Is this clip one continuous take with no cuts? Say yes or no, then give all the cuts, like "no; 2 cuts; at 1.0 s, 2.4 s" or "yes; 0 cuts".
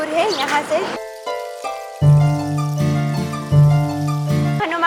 yes; 0 cuts